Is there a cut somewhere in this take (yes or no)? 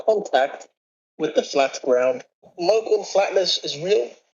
yes